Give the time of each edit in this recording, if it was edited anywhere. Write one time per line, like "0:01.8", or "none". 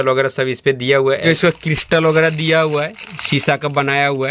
0:01.2
0:03.1